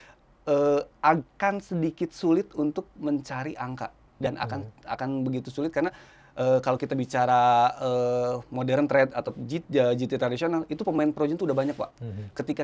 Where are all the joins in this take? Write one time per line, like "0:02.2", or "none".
none